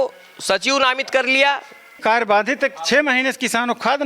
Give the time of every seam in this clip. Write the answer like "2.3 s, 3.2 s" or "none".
2.0 s